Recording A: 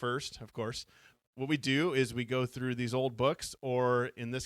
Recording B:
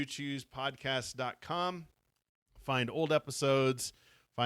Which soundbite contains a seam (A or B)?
A